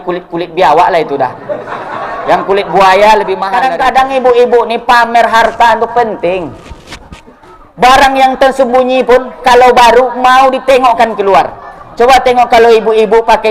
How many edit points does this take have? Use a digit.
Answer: 1